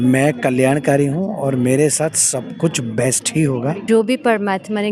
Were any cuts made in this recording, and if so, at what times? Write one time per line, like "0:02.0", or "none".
0:03.8